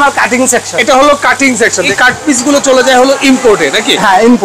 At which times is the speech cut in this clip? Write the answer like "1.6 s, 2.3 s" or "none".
1.8 s